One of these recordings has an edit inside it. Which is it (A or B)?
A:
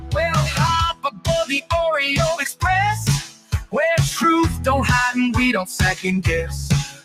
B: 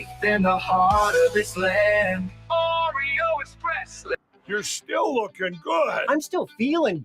B